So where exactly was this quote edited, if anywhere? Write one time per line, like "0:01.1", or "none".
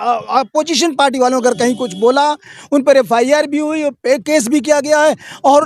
none